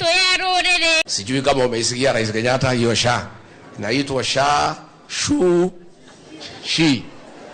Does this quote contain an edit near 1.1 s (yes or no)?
yes